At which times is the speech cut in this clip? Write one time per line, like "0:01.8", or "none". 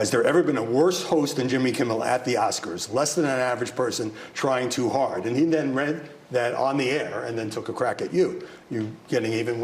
none